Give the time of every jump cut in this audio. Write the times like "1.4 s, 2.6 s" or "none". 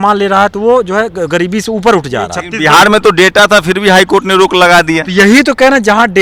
2.4 s